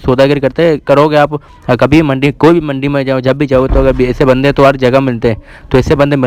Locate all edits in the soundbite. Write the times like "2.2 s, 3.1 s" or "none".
none